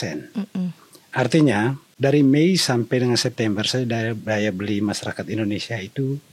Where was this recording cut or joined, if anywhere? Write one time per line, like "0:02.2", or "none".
0:01.9